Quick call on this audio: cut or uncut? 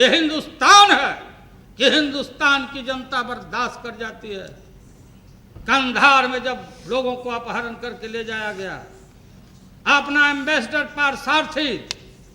uncut